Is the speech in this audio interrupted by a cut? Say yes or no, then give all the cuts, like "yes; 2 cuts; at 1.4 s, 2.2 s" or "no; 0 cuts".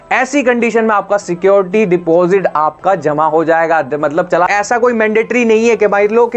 yes; 1 cut; at 4.5 s